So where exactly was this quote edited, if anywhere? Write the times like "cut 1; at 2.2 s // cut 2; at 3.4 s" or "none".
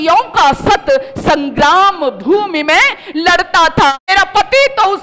cut 1; at 4.0 s